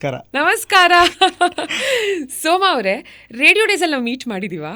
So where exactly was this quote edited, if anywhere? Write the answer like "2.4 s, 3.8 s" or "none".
none